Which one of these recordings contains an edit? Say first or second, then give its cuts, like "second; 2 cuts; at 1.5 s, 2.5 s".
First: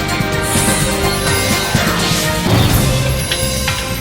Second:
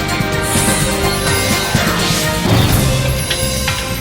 second; 1 cut; at 2.0 s